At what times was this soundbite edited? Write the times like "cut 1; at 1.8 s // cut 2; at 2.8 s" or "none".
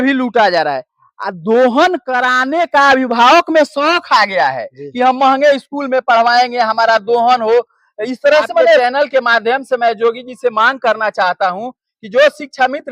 cut 1; at 8.8 s